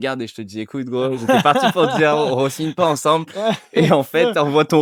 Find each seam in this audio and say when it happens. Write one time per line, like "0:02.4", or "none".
none